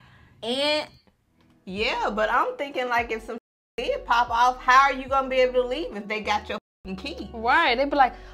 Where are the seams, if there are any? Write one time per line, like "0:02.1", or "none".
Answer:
none